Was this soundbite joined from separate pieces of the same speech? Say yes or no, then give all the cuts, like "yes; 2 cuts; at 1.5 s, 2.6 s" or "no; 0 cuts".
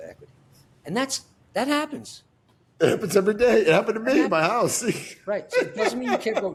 no; 0 cuts